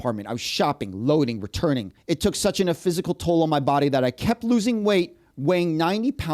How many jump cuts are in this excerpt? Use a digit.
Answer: 1